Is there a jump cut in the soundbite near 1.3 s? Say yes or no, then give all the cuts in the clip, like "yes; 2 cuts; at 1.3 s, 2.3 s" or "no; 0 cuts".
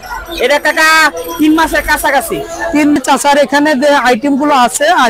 no; 1 cut; at 3.0 s